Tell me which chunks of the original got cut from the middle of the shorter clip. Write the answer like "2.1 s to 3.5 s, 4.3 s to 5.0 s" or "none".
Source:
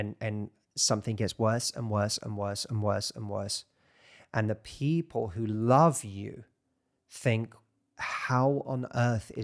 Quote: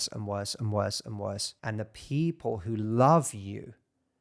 3.6 s to 4.2 s

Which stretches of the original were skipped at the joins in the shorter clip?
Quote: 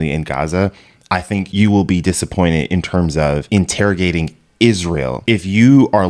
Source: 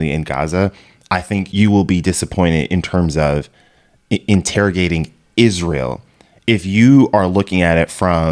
3.5 s to 4.2 s, 5.9 s to 6.4 s

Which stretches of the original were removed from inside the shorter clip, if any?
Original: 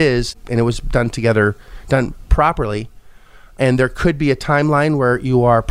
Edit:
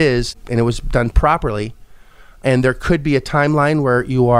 1.1 s to 2.3 s

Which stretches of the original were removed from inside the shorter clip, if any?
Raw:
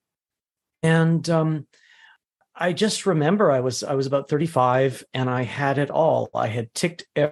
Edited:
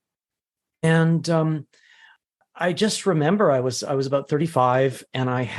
none

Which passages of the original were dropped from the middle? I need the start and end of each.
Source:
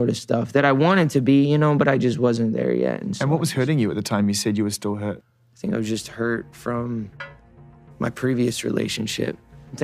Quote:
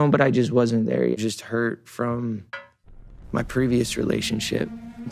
2.8 s to 5.8 s

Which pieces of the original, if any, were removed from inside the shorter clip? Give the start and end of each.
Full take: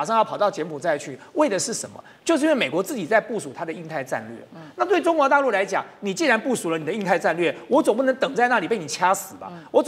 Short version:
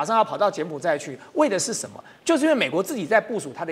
none

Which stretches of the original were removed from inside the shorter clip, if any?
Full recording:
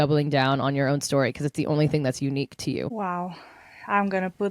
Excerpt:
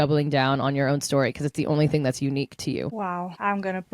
3.0 s to 3.4 s

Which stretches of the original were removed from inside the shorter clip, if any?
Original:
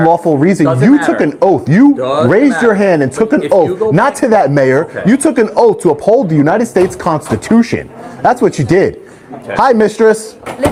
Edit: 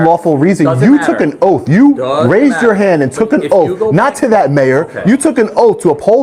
none

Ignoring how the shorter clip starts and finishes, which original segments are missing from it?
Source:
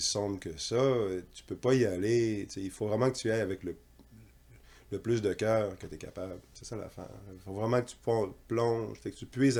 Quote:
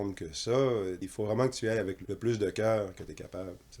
1.3 s to 2.7 s, 3.6 s to 4.8 s

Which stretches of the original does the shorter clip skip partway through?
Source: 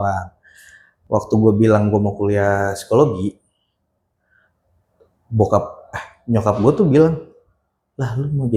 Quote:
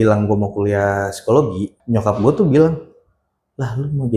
3.4 s to 6.1 s

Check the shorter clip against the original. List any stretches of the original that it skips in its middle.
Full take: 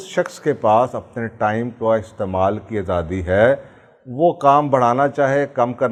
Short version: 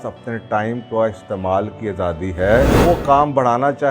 3.6 s to 4.1 s

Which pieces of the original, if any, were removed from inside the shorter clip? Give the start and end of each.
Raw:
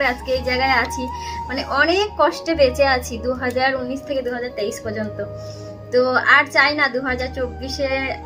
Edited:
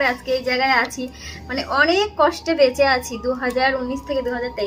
none

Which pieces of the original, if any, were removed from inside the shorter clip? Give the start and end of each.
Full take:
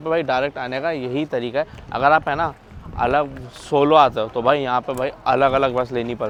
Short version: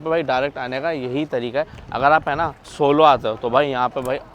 2.6 s to 3.5 s

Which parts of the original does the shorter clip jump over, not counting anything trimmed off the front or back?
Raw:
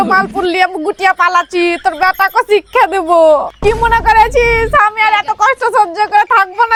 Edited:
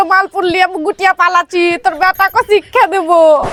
none

